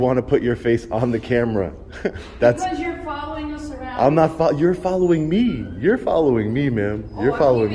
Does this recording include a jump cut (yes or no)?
no